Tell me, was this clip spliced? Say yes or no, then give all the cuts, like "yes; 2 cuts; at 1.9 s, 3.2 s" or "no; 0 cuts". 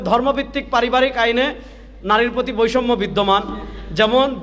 no; 0 cuts